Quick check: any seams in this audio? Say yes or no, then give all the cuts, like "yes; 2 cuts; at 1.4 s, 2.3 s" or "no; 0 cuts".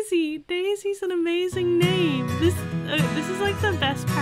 no; 0 cuts